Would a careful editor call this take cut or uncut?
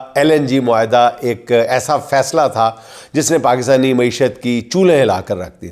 uncut